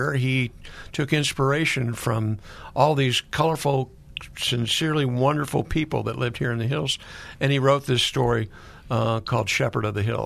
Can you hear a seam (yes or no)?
no